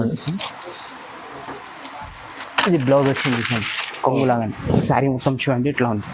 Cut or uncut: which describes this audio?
cut